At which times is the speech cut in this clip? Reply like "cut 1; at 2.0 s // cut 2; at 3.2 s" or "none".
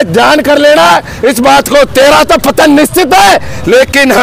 none